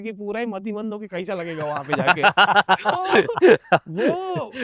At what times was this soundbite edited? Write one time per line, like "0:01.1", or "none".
none